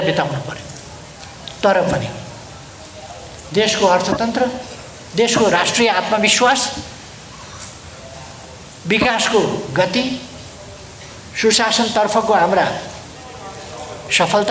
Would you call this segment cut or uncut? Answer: uncut